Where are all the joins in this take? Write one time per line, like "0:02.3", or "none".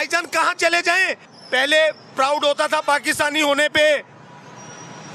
0:01.4